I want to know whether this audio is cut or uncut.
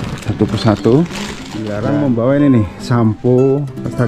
cut